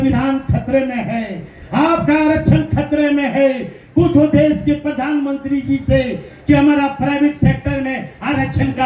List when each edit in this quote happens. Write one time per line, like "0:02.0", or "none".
none